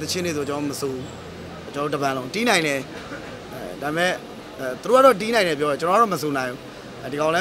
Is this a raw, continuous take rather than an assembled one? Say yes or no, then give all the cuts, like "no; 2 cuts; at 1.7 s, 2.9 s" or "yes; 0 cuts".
yes; 0 cuts